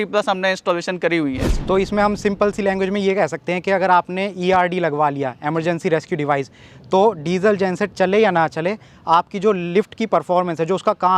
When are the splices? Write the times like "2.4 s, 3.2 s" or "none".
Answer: none